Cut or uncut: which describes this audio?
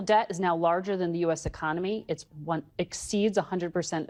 uncut